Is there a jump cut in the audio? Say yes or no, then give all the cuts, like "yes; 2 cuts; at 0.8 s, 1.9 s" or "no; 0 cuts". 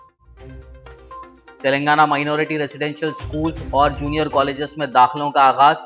yes; 1 cut; at 1.5 s